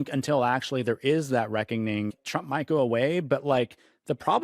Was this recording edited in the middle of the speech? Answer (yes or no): yes